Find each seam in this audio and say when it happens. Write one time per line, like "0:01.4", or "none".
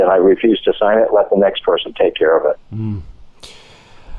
none